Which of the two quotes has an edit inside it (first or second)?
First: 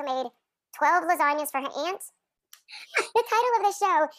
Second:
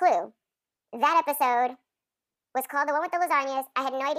first